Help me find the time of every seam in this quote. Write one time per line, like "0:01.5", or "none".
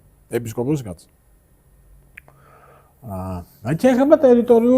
none